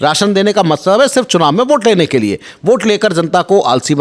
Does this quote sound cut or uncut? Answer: uncut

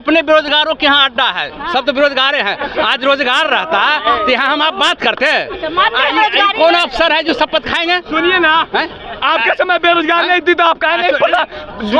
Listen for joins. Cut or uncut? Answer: uncut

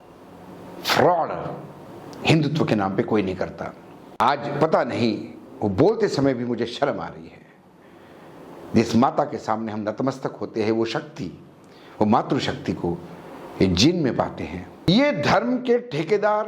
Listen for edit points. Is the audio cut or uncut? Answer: cut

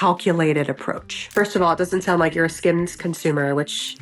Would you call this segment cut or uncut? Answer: cut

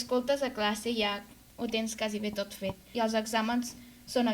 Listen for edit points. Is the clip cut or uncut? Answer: cut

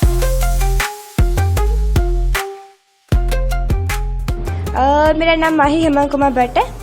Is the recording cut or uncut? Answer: cut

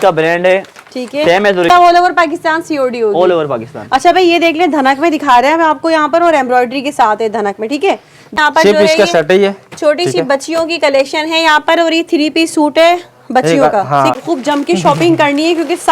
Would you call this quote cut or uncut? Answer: cut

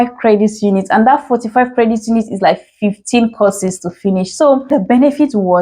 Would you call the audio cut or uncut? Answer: cut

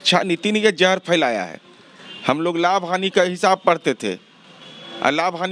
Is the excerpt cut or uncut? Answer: uncut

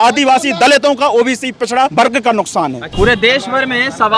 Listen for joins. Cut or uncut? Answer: cut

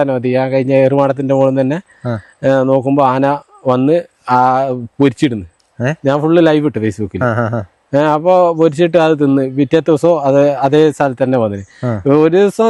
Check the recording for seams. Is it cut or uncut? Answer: uncut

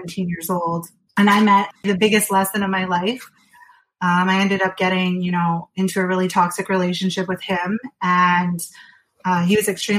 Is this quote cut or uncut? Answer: cut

